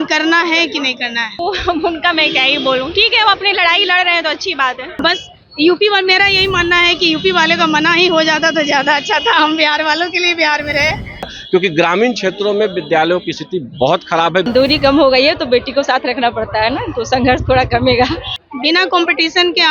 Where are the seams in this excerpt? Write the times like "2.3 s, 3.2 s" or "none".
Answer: 1.3 s, 5.0 s, 11.4 s, 14.5 s, 18.4 s